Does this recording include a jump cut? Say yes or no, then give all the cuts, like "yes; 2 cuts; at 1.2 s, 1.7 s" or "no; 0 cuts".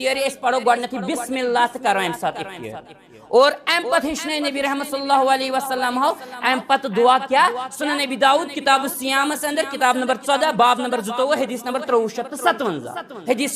no; 0 cuts